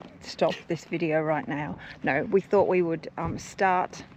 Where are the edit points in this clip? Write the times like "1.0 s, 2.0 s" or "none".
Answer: none